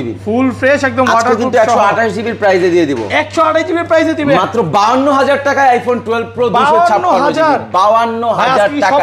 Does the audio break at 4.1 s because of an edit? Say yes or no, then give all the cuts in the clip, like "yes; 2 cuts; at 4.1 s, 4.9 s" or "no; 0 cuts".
no; 0 cuts